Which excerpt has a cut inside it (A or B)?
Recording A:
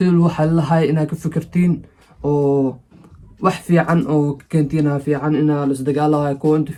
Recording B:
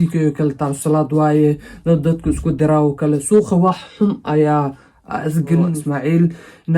B